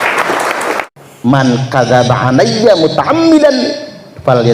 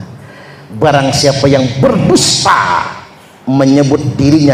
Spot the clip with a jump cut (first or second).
first